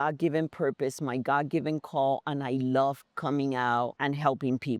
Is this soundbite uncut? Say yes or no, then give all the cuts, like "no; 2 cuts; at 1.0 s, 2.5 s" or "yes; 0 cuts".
yes; 0 cuts